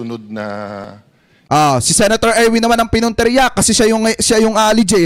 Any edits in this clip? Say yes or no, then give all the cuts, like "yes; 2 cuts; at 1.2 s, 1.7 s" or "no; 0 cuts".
no; 0 cuts